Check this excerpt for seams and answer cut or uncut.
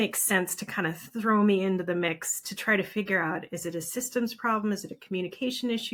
uncut